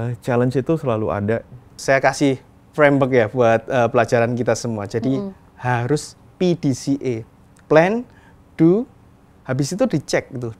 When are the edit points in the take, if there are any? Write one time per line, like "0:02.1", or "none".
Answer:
0:01.8